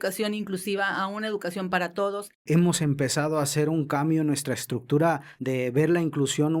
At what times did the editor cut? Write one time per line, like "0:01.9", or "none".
0:02.3
0:05.3